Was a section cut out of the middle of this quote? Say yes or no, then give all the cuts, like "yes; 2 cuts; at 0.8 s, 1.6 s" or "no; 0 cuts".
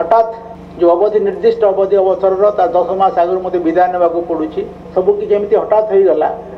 yes; 1 cut; at 4.8 s